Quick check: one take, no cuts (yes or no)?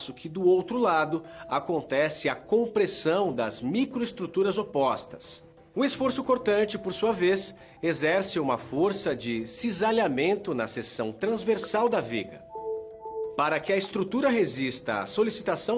no